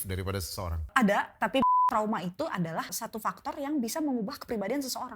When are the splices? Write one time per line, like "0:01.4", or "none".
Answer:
0:00.9
0:01.7
0:03.0